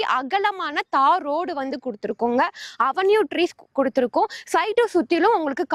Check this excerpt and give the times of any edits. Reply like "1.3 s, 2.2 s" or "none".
none